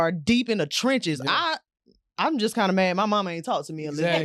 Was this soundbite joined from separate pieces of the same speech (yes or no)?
no